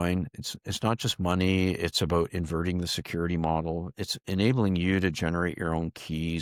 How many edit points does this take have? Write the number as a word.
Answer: zero